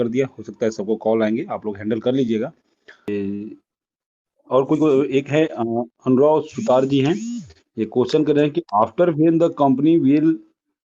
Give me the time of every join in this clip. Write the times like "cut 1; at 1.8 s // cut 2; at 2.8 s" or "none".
cut 1; at 3.1 s